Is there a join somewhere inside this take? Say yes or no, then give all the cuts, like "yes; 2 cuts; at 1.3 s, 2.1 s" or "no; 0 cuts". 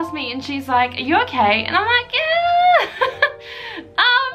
no; 0 cuts